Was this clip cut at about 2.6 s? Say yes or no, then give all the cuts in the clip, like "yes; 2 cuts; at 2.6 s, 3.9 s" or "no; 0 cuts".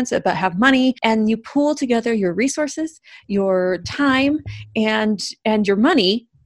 no; 1 cut; at 1.0 s